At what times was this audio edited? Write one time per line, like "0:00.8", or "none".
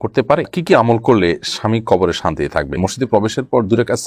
0:02.8